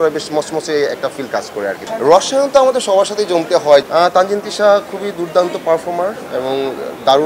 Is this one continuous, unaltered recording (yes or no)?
no